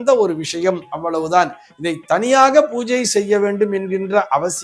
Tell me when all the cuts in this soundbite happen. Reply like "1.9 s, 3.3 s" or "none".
none